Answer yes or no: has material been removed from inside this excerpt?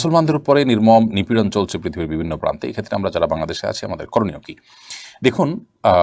no